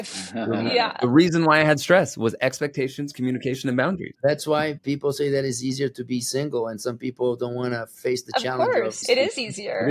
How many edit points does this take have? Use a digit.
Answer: 2